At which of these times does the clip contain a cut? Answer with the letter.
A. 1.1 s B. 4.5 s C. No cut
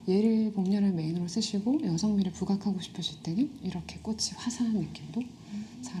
C